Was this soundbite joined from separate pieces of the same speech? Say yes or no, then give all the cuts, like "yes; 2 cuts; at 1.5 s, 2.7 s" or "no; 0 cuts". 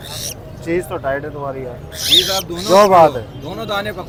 no; 0 cuts